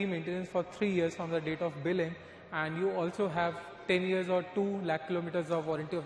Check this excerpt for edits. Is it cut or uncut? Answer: uncut